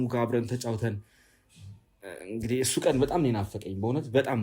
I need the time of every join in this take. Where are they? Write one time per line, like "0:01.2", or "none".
none

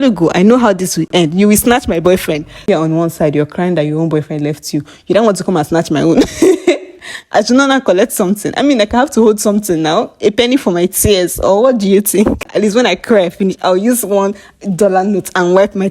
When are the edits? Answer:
0:01.1
0:02.6
0:12.5

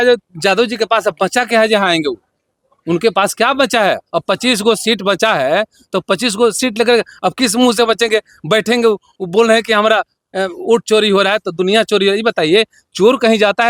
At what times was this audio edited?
none

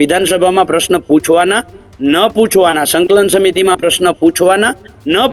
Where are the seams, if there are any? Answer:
none

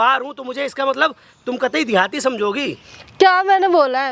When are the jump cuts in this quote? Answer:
none

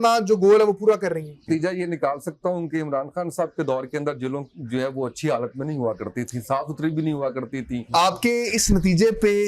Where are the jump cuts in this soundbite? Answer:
0:01.4
0:07.8

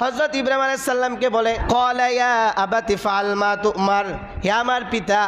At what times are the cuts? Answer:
0:01.6

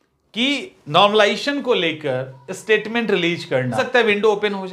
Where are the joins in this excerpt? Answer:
0:03.8

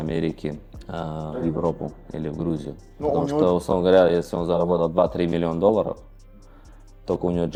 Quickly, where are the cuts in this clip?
none

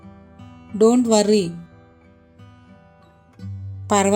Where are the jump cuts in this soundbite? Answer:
0:01.6
0:03.2

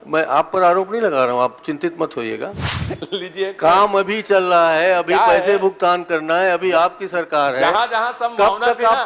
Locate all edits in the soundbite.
0:02.6

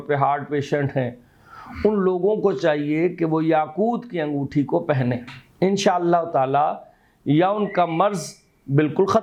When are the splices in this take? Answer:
none

